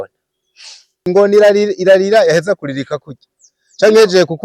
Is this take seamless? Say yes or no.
no